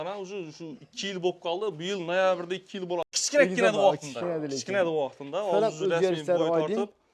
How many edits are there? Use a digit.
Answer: 1